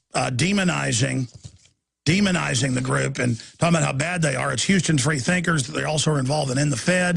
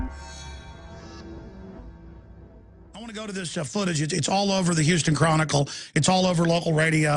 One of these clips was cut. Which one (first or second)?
first